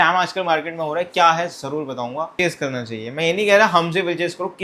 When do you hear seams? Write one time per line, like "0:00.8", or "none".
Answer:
0:02.4